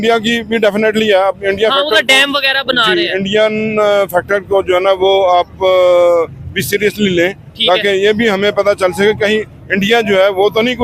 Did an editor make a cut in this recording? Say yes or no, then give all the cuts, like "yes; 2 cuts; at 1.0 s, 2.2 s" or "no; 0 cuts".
no; 0 cuts